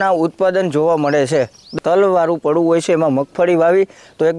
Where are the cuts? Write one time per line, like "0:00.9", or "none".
0:01.8

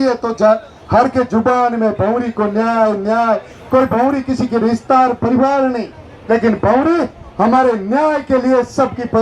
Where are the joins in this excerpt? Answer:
none

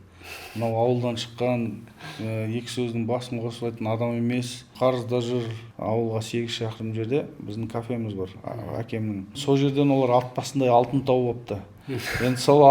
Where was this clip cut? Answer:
0:04.7
0:05.6
0:09.4

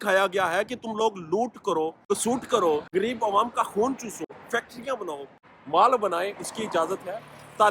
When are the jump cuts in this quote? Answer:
0:02.0
0:02.9
0:04.3
0:05.4

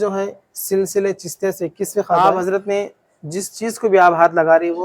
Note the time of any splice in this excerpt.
0:02.2

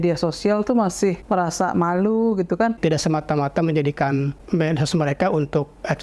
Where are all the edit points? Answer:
0:01.2
0:02.8
0:04.4

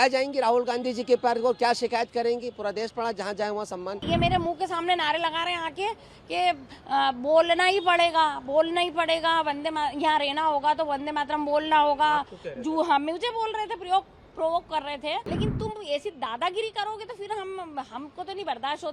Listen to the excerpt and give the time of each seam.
0:04.0
0:15.3

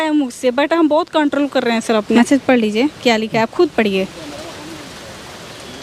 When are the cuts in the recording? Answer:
0:02.1

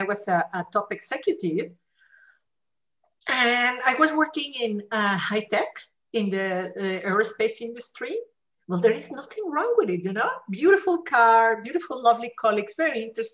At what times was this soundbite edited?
none

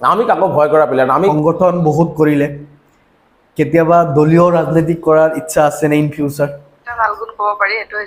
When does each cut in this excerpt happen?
0:01.3
0:06.9

